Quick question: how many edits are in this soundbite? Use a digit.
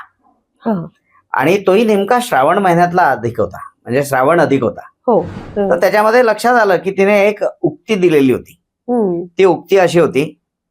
1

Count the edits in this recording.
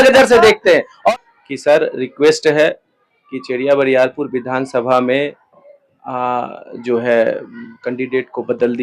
1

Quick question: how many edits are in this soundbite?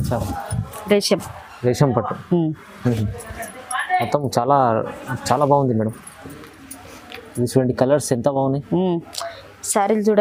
0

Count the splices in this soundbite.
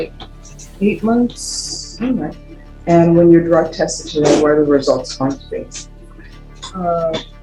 0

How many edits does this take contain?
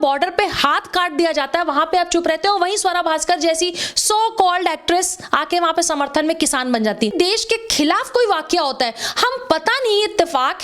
1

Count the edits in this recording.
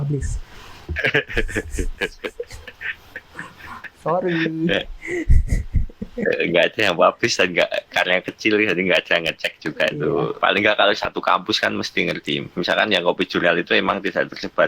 1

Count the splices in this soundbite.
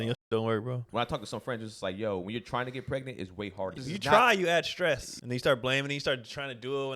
3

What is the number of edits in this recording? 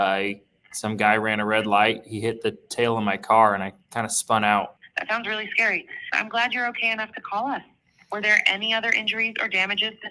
1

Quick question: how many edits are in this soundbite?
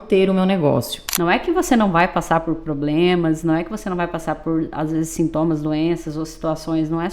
1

